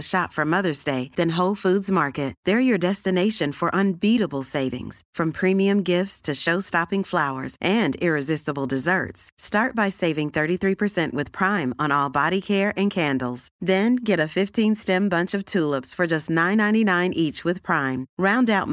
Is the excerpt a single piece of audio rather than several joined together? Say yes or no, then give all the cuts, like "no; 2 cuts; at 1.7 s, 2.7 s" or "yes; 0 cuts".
yes; 0 cuts